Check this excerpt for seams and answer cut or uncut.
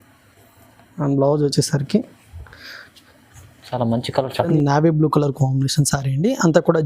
cut